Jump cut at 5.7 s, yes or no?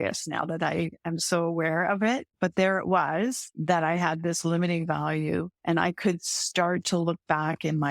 no